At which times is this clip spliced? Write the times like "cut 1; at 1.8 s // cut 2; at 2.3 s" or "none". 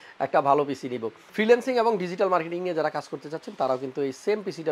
cut 1; at 1.3 s